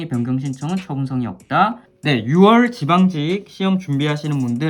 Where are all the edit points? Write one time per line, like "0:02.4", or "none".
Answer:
0:01.9